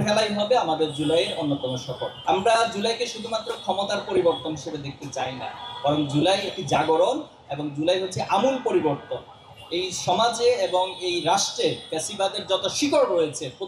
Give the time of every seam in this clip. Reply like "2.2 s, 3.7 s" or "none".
2.1 s